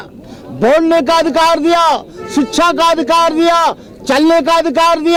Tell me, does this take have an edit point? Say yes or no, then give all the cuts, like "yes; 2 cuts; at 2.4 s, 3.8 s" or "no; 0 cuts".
no; 0 cuts